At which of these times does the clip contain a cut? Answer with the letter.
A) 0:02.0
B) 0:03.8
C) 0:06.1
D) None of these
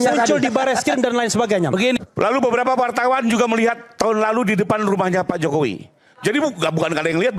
A